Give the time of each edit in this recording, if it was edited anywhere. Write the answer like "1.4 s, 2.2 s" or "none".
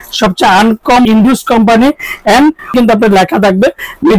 1.1 s, 2.7 s